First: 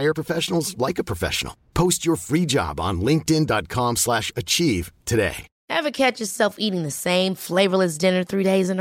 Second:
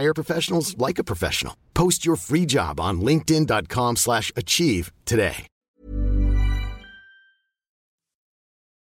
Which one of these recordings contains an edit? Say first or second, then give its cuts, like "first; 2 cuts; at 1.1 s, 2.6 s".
first; 1 cut; at 5.5 s